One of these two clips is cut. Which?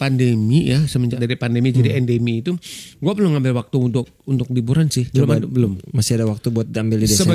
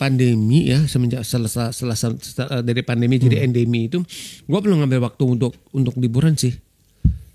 first; 2 cuts; at 1.2 s, 5.1 s

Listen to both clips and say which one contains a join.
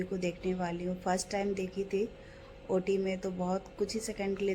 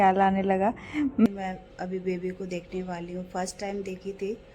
second; 1 cut; at 1.3 s

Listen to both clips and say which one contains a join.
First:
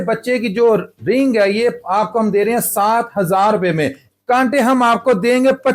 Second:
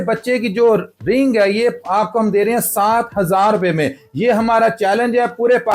first; 1 cut; at 4.1 s

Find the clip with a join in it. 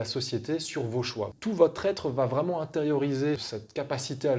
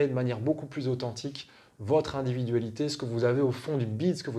first; 2 cuts; at 1.3 s, 3.4 s

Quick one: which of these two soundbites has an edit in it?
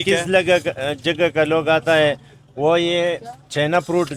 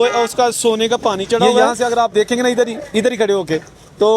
second; 1 cut; at 1.6 s

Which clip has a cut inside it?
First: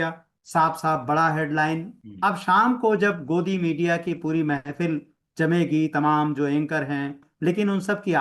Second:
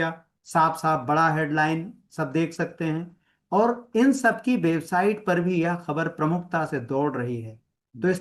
first; 2 cuts; at 2.0 s, 7.3 s

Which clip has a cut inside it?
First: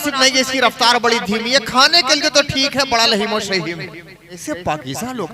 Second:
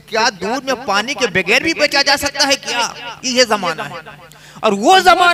first; 1 cut; at 4.4 s

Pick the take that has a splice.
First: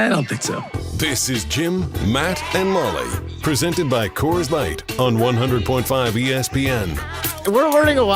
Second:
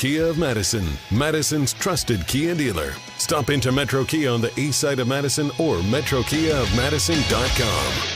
first; 1 cut; at 7.2 s

